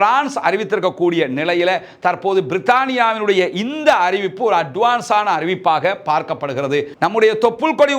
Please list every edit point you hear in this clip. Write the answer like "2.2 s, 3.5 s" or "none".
6.9 s